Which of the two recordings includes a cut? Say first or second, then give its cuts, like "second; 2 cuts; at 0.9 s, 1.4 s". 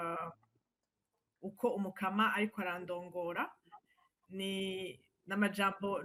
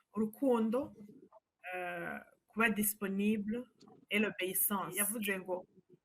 second; 1 cut; at 4.9 s